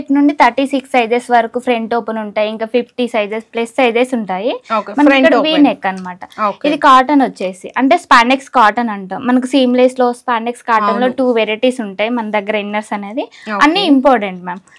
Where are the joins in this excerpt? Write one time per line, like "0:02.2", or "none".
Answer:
none